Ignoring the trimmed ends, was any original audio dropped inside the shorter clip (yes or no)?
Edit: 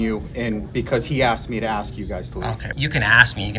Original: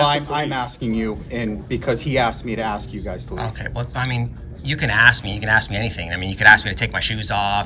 yes